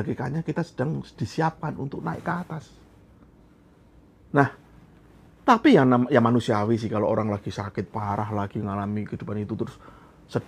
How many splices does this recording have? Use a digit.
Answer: 0